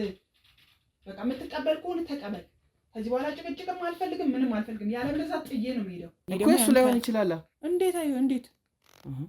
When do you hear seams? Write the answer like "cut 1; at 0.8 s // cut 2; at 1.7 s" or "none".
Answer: cut 1; at 6.1 s